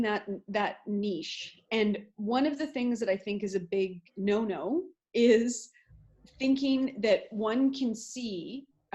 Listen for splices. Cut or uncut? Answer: uncut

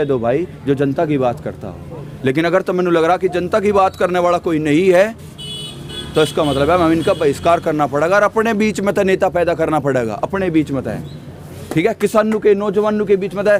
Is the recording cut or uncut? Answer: uncut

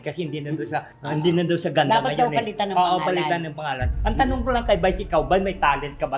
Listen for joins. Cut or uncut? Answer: cut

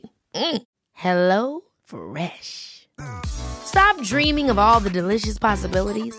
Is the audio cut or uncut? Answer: uncut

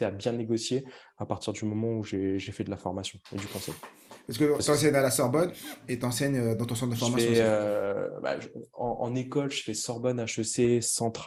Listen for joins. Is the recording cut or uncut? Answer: uncut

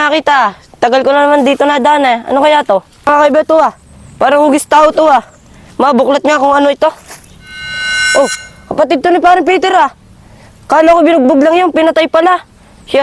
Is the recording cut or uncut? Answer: cut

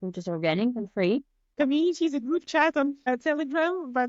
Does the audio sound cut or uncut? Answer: cut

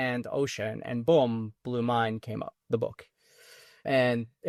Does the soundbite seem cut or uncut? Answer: uncut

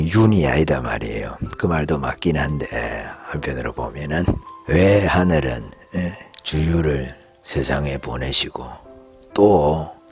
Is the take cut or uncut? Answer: uncut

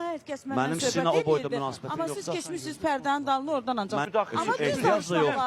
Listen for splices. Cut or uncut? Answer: cut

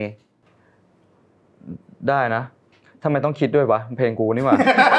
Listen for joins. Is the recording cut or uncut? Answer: uncut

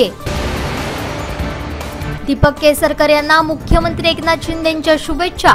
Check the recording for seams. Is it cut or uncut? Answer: uncut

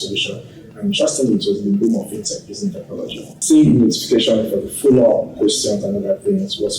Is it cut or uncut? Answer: cut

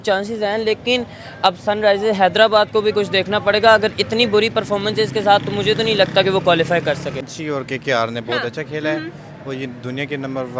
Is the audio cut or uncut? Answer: cut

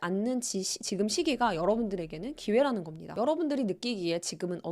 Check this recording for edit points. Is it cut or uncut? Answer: cut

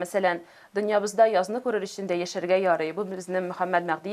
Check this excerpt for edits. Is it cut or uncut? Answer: uncut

